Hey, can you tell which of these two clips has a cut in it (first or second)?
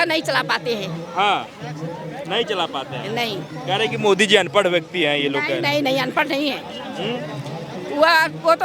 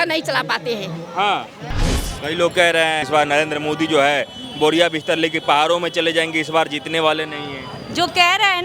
second